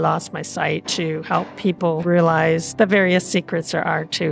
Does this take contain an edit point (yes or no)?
yes